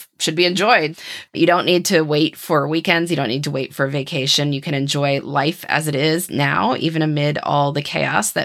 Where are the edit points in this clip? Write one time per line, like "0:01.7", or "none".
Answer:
0:01.0